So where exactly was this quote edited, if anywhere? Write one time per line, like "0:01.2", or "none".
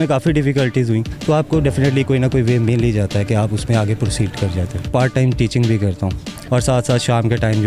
0:01.1
0:04.9
0:06.3

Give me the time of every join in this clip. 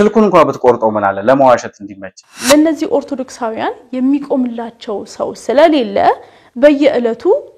0:02.3

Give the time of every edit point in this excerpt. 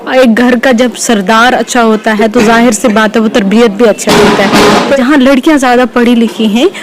0:05.0

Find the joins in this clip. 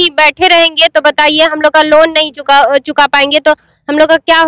none

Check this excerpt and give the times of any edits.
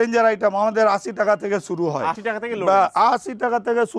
none

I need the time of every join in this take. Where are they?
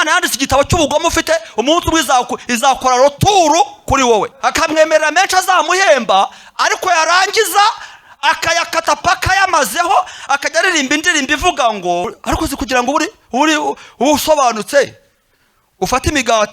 0:04.3
0:12.2

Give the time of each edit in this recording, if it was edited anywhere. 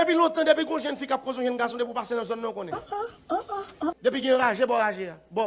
0:02.6
0:04.0

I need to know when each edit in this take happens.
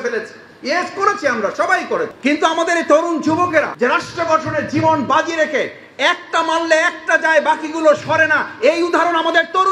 0:03.7

